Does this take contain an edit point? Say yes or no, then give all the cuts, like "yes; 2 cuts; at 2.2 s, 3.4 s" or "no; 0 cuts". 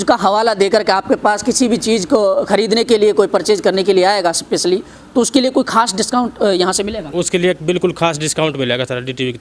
no; 0 cuts